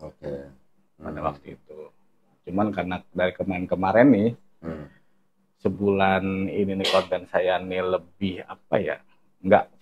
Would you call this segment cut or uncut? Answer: uncut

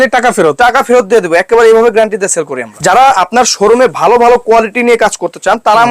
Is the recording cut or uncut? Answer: cut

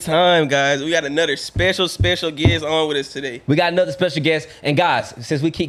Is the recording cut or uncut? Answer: uncut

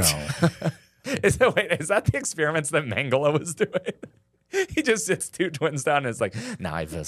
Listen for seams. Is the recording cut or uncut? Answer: cut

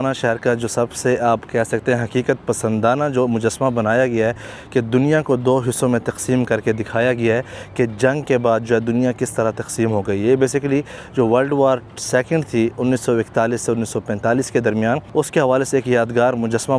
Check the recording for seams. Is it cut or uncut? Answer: uncut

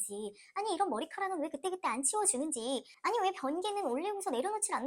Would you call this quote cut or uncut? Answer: uncut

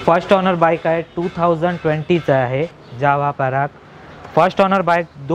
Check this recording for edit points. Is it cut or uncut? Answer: cut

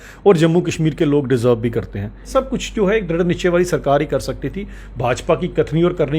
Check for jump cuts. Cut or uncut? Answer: cut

